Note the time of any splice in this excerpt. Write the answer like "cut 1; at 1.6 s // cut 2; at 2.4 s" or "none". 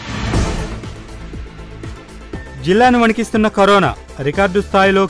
cut 1; at 2.4 s

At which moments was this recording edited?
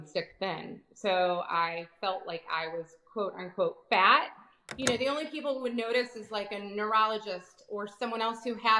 cut 1; at 4.6 s

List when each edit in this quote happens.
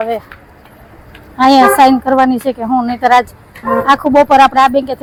none

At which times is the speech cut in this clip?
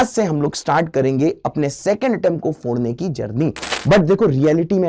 cut 1; at 3.7 s

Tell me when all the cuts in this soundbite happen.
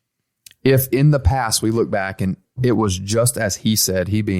cut 1; at 2.4 s

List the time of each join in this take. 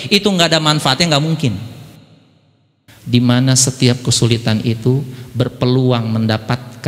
cut 1; at 2.5 s

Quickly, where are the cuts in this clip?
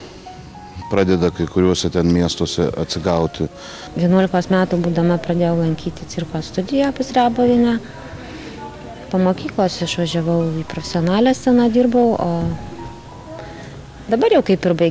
cut 1; at 3.8 s

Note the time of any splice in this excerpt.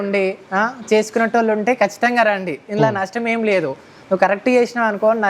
none

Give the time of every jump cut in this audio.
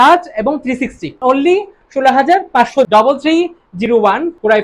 cut 1; at 1.2 s // cut 2; at 2.9 s

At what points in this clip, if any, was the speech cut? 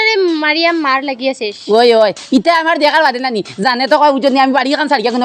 none

